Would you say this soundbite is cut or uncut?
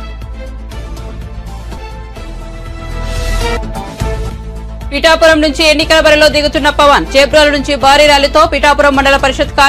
cut